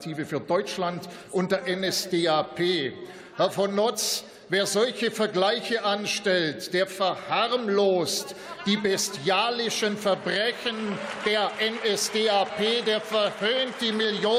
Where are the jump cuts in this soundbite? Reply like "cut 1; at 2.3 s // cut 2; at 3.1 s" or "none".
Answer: none

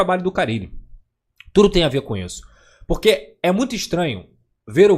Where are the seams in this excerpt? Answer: none

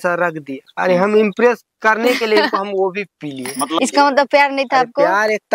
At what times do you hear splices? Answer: cut 1; at 3.6 s

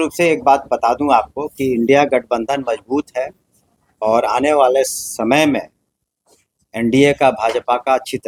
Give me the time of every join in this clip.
none

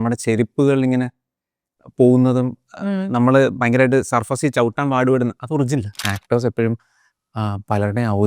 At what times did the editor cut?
cut 1; at 6.1 s

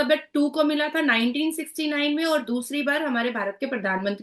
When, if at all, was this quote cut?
none

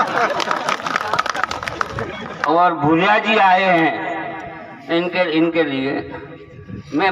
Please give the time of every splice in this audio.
cut 1; at 2.4 s

